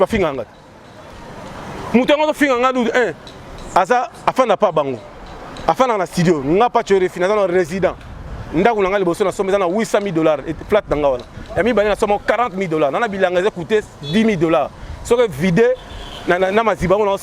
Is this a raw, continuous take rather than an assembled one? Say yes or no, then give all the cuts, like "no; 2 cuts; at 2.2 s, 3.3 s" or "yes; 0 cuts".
yes; 0 cuts